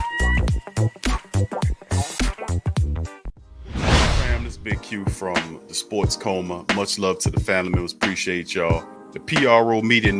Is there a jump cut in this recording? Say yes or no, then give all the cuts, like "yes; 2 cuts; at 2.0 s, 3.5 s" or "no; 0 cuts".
yes; 2 cuts; at 3.4 s, 4.3 s